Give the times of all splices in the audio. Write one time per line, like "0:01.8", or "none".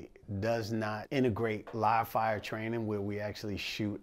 0:01.0

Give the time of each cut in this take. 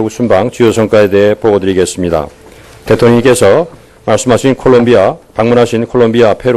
0:02.6

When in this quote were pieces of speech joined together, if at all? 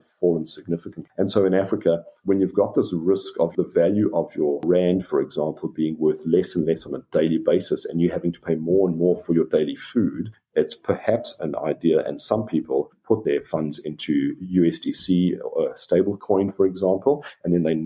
0:00.9

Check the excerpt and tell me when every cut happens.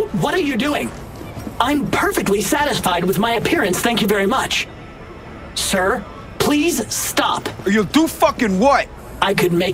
0:01.3
0:07.5

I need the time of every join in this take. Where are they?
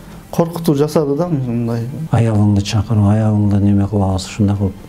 0:02.0

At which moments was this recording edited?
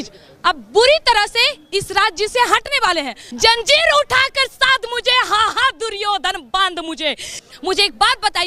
0:03.2
0:07.4

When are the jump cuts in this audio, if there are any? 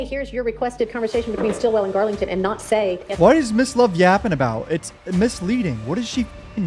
none

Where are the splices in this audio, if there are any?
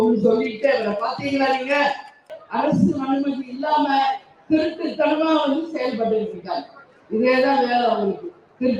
0:02.4

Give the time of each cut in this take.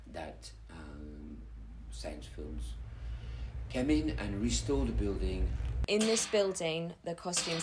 0:05.8

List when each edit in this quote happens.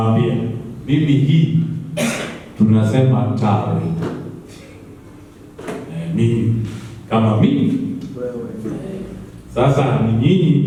none

